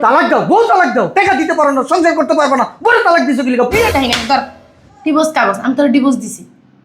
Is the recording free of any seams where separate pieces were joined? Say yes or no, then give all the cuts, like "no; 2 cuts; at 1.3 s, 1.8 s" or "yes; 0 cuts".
no; 1 cut; at 3.9 s